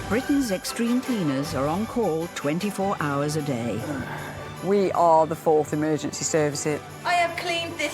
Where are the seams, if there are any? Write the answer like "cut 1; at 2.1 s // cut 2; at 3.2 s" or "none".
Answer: cut 1; at 7.0 s